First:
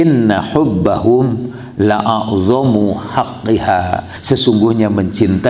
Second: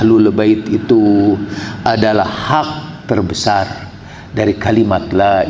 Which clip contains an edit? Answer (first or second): first